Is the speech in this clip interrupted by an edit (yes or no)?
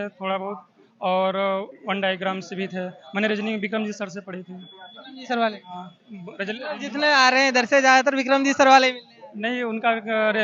no